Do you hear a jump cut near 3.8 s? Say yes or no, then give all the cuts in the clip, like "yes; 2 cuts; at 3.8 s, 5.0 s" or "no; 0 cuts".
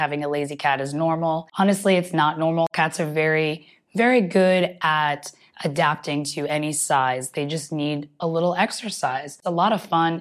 no; 2 cuts; at 1.5 s, 9.4 s